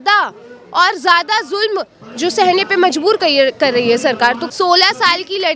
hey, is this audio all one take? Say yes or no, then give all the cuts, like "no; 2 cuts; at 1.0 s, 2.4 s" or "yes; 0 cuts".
no; 1 cut; at 4.4 s